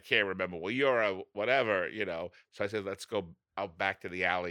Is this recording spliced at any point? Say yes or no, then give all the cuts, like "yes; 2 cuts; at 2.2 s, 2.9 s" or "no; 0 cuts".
yes; 2 cuts; at 2.4 s, 3.4 s